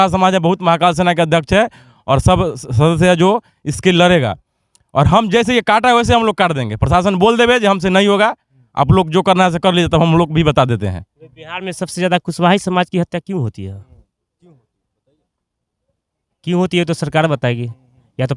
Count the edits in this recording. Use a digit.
0